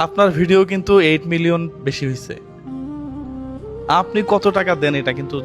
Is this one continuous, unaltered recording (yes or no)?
yes